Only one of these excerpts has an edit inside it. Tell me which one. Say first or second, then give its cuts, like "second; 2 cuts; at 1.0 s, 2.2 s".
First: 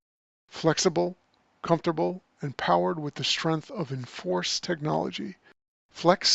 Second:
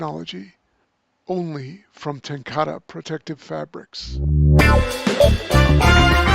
second; 1 cut; at 4.2 s